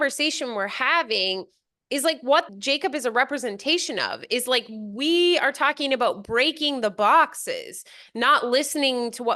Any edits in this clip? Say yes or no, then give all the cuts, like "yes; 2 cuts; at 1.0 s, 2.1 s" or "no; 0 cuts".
yes; 1 cut; at 2.5 s